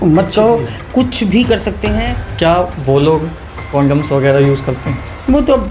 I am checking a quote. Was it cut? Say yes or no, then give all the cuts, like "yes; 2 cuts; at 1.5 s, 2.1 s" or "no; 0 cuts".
yes; 1 cut; at 2.3 s